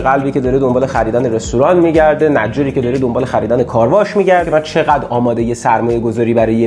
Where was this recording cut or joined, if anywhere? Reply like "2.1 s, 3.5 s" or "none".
4.5 s